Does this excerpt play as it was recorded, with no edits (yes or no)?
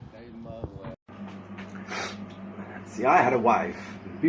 no